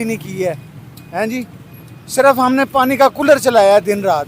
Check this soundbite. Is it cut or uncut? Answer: uncut